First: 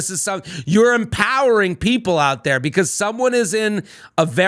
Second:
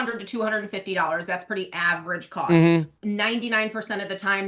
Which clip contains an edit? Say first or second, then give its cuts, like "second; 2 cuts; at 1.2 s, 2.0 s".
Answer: second; 1 cut; at 2.9 s